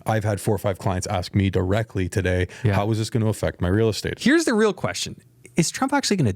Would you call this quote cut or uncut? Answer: cut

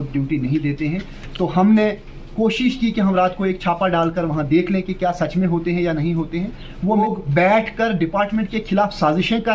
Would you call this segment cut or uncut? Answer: cut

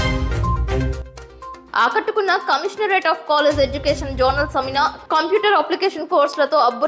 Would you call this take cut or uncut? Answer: cut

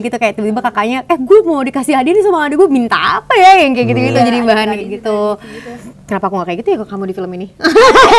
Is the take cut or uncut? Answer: uncut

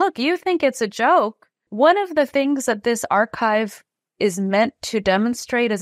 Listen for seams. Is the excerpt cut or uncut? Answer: cut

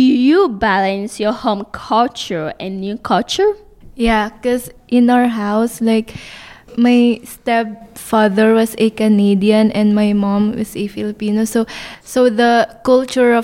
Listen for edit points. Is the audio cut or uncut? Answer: uncut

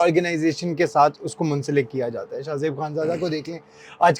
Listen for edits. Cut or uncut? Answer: uncut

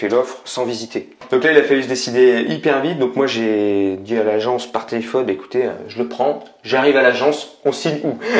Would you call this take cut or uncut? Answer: cut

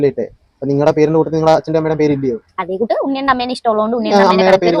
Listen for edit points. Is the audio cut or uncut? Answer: uncut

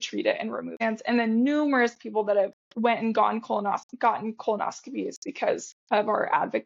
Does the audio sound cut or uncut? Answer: cut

